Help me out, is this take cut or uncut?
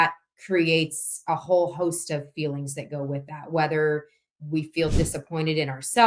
uncut